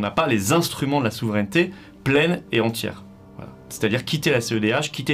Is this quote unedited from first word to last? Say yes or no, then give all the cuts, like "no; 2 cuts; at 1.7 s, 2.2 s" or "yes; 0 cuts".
yes; 0 cuts